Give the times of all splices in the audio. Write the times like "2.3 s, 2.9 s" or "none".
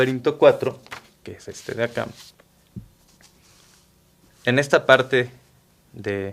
4.8 s

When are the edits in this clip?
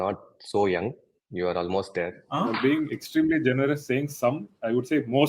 2.2 s

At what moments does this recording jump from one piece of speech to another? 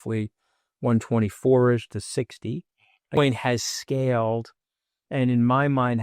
3.2 s

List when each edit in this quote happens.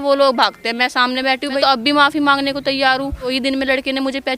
1.6 s, 3.3 s

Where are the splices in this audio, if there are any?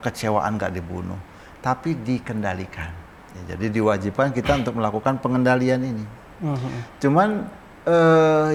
none

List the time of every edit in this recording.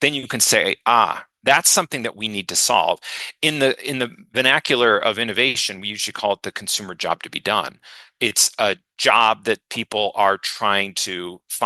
none

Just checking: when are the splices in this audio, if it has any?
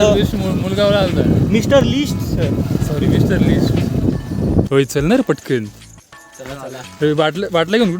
4.7 s

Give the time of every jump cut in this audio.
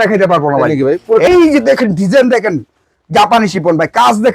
1.3 s

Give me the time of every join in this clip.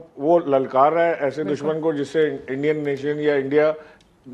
1.2 s

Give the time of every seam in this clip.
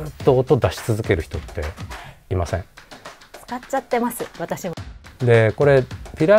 4.7 s

